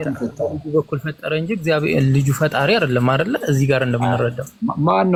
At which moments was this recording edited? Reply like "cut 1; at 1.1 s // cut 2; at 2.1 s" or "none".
none